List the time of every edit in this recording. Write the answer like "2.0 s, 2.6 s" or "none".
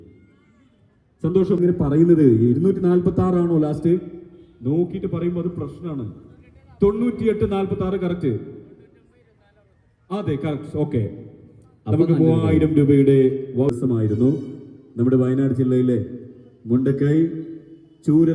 1.6 s, 13.7 s